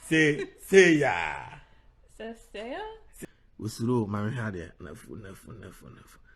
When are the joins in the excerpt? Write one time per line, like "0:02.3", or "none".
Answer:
0:03.1